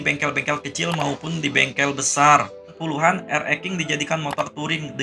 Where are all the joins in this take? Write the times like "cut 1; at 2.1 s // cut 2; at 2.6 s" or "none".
cut 1; at 2.8 s